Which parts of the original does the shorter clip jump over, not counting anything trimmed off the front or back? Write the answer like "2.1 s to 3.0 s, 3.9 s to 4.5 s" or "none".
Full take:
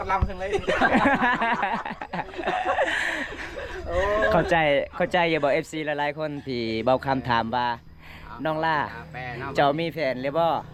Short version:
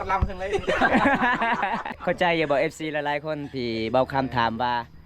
2.0 s to 4.9 s